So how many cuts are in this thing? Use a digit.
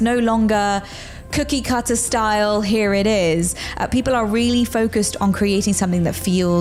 0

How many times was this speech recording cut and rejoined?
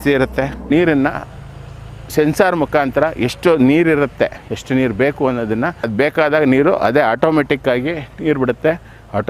2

